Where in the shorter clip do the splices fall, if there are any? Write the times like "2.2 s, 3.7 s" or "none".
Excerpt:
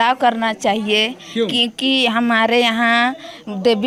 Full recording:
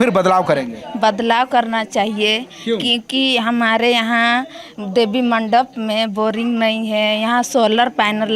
none